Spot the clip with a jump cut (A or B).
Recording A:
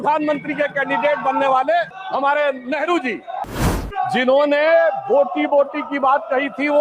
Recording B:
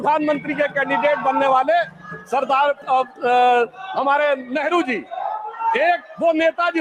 A